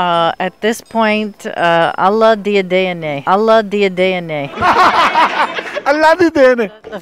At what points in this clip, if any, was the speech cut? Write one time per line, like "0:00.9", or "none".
0:04.4